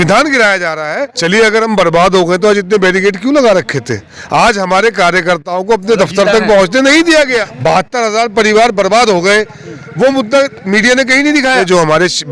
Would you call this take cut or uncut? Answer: cut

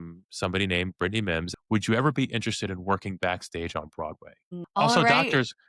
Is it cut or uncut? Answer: cut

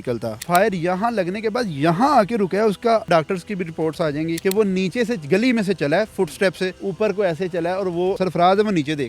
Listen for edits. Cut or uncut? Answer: cut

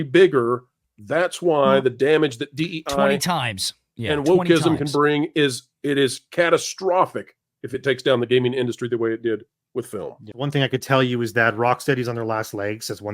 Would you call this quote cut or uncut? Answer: cut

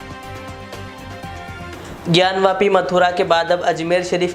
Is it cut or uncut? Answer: cut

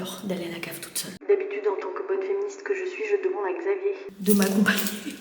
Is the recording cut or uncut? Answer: uncut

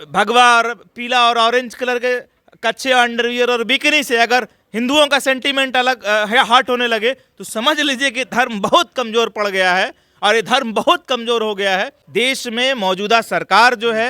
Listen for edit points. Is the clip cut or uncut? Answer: cut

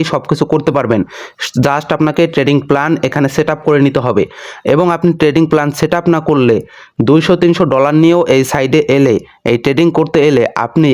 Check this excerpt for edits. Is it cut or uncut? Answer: uncut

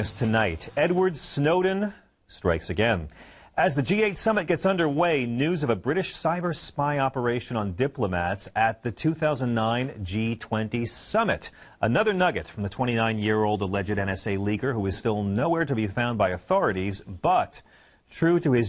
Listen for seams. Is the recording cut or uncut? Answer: uncut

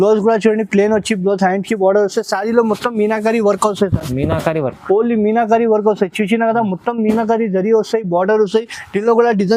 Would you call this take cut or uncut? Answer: uncut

